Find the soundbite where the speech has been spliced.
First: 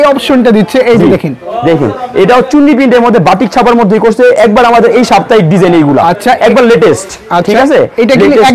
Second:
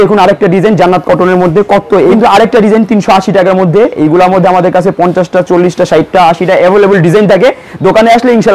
second; 1 cut; at 2.1 s

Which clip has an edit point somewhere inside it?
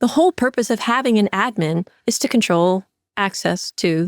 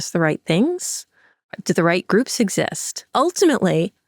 second; 1 cut; at 3.1 s

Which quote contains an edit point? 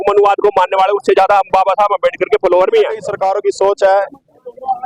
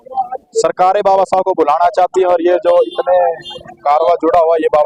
first; 1 cut; at 3.1 s

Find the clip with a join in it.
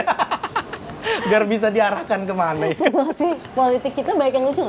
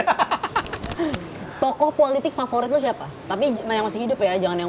second; 1 cut; at 0.9 s

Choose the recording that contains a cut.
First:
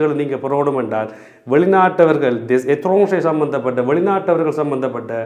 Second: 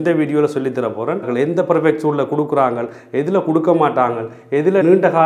second; 1 cut; at 1.2 s

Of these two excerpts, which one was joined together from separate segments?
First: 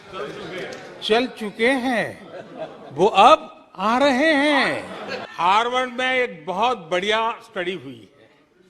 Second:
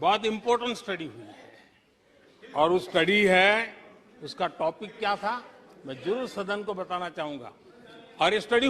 first; 1 cut; at 5.2 s

